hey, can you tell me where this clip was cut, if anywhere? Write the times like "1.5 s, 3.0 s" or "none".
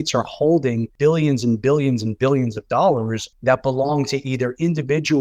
0.9 s, 3.2 s